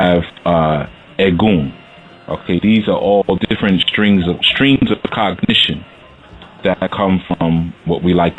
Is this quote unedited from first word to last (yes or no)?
yes